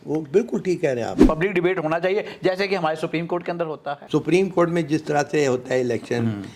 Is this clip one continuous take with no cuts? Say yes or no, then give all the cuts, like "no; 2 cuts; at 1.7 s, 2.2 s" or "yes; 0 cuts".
no; 2 cuts; at 1.2 s, 3.9 s